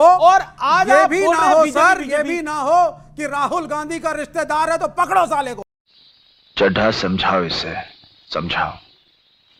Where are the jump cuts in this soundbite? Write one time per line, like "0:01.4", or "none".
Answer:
none